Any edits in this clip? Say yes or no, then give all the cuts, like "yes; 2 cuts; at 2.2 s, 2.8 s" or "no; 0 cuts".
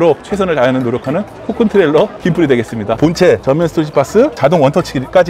yes; 2 cuts; at 3.0 s, 4.4 s